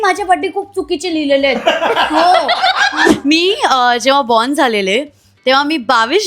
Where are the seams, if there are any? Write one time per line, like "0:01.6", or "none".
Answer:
0:03.1